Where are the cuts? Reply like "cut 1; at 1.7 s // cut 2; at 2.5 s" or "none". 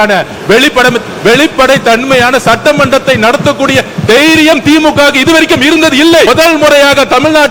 cut 1; at 6.3 s